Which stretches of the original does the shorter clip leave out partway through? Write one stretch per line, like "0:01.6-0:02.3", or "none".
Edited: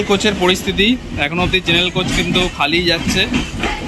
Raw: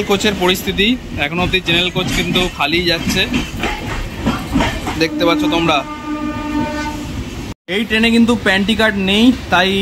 none